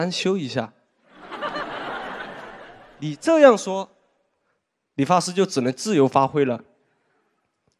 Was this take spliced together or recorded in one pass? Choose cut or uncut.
uncut